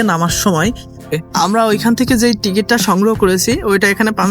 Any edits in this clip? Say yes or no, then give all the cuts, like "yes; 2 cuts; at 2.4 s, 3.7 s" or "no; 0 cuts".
yes; 1 cut; at 1.1 s